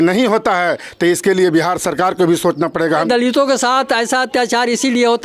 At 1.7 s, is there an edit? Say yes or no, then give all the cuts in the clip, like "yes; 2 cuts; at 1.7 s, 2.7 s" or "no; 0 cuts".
no; 1 cut; at 3.0 s